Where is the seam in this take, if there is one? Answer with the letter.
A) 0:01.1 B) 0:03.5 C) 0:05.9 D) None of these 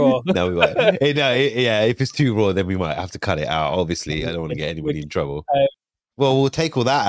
C